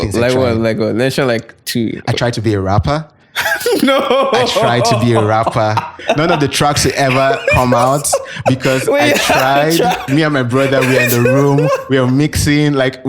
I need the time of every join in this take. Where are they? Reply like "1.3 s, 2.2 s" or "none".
6.0 s, 10.0 s